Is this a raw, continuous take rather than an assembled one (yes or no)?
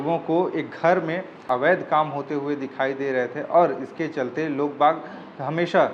no